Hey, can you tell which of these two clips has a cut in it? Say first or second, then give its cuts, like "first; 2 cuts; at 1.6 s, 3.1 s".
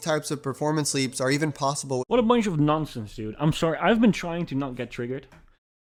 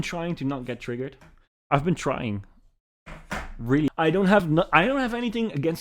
second; 1 cut; at 3.9 s